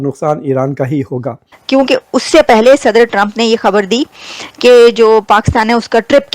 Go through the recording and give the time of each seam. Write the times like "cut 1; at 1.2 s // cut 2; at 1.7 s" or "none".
cut 1; at 1.5 s